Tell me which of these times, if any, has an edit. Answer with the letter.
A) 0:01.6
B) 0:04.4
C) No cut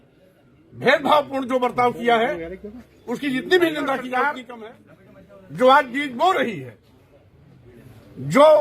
B